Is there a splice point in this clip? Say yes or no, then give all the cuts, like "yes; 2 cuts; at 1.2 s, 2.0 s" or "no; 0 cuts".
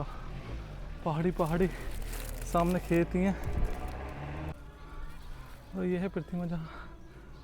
yes; 1 cut; at 4.5 s